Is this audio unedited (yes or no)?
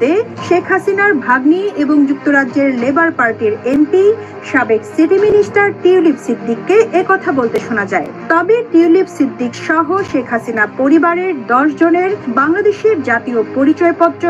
yes